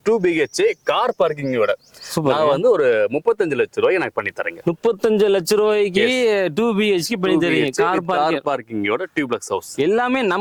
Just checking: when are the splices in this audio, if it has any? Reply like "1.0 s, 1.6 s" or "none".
none